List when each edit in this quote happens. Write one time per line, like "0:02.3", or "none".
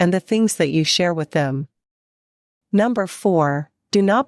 0:03.3